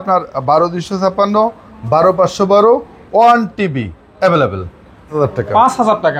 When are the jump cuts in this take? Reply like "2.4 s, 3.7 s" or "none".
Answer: 5.1 s